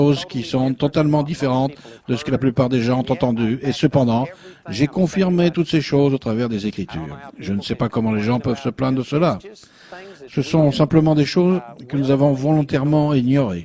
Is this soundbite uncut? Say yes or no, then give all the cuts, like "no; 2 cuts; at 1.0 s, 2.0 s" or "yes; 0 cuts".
yes; 0 cuts